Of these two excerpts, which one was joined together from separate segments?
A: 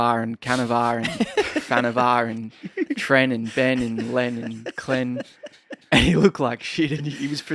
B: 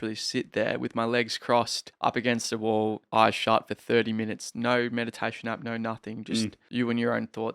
B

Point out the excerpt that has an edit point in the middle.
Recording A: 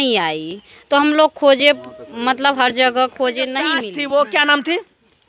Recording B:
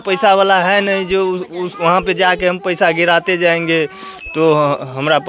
A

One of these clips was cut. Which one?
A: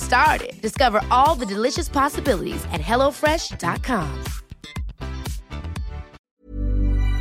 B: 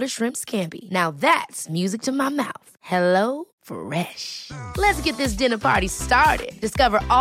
A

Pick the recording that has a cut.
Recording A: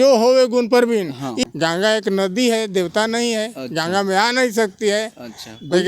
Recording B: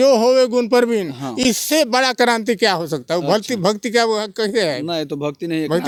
A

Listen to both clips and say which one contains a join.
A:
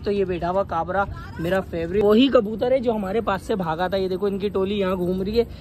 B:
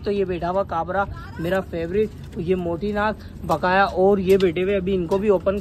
A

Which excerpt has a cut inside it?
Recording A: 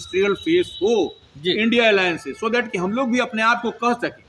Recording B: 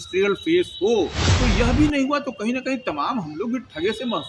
B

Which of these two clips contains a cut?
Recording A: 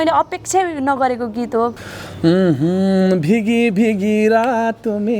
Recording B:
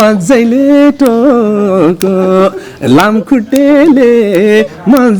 A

